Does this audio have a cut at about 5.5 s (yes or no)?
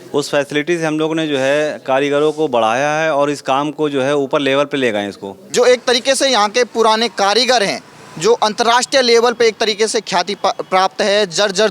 yes